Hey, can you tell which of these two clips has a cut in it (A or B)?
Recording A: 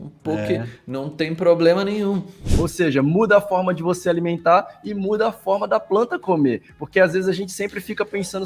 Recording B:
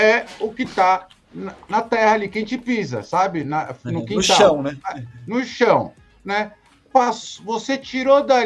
A